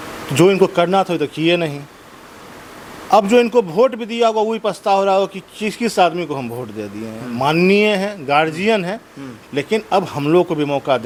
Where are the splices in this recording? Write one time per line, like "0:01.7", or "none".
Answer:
none